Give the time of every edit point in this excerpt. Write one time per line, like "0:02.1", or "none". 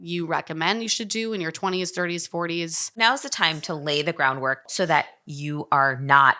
0:02.9
0:04.6